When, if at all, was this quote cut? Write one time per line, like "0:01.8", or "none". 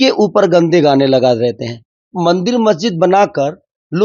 0:02.1